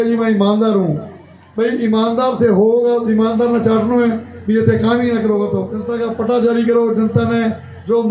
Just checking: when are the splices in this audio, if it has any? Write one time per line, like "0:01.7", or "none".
0:05.8